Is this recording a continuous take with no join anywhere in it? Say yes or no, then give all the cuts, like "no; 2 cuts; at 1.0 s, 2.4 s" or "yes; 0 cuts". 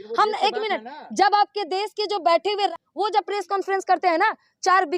no; 1 cut; at 2.7 s